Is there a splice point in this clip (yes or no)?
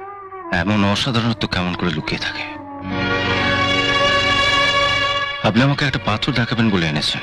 no